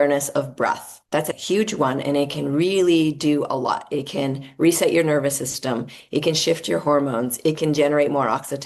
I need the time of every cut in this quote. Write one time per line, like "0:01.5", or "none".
0:00.9